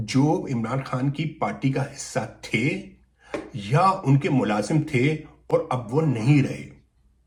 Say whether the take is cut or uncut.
uncut